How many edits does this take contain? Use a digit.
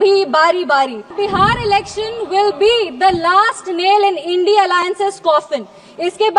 1